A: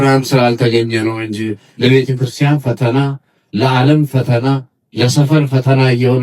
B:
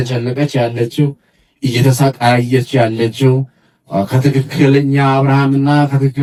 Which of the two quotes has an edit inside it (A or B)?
A